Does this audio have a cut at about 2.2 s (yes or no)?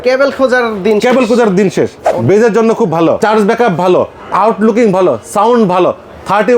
yes